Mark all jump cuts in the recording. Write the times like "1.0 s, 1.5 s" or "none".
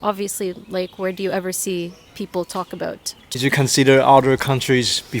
3.2 s